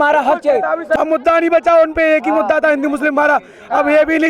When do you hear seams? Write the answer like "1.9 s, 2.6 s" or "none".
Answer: 1.0 s

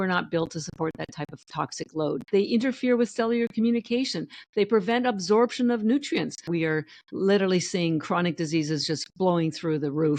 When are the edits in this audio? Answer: 2.2 s, 6.5 s

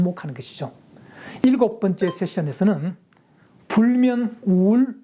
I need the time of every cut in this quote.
1.4 s

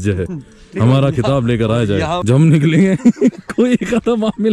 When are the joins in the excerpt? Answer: 2.2 s

